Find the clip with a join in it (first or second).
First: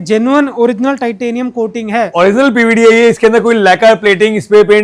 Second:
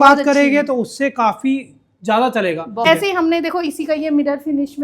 second